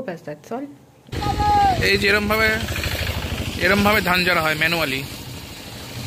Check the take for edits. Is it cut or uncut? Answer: cut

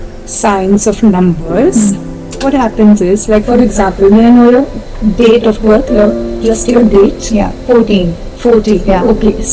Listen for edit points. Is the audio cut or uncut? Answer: uncut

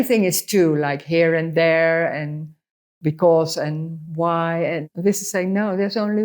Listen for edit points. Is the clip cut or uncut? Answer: cut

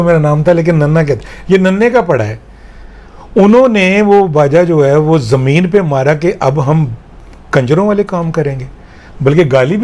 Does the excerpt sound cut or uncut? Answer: uncut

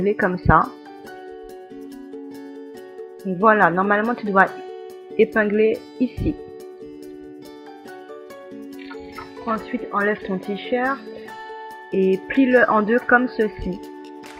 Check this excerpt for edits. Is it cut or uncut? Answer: uncut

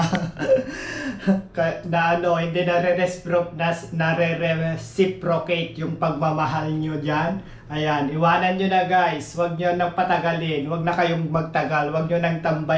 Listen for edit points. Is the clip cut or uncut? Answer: uncut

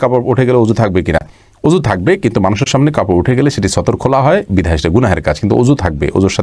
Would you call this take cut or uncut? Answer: uncut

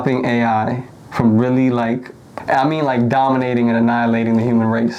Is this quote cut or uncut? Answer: cut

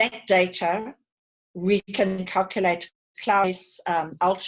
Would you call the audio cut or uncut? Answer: uncut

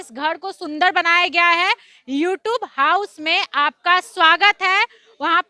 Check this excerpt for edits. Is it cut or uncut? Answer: uncut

